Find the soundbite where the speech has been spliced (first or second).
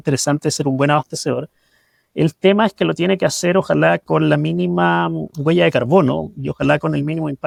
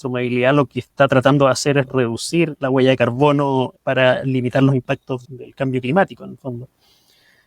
second